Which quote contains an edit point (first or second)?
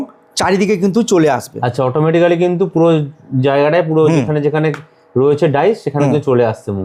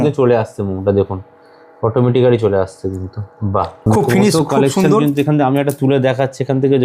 second